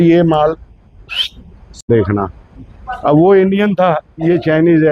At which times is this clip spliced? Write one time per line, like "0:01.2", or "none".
0:01.9

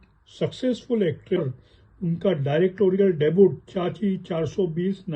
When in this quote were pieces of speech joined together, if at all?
0:01.6

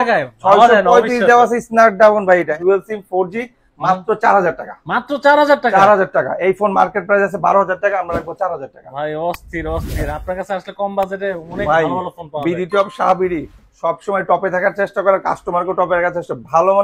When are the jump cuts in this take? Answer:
0:02.5

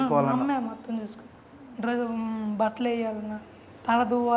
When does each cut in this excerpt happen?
none

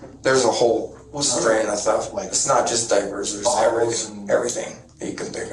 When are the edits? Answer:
none

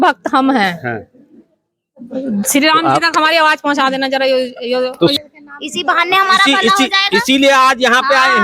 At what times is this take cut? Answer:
0:05.1

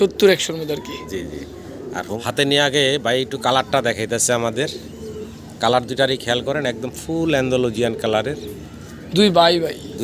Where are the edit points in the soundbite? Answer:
0:02.1

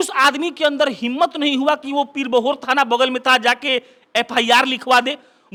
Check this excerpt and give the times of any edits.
none

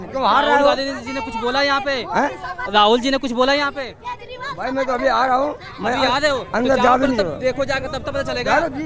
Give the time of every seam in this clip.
none

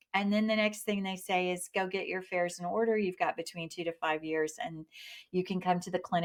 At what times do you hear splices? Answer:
none

